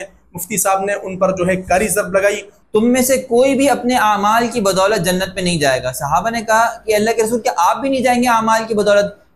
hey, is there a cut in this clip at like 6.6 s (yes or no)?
no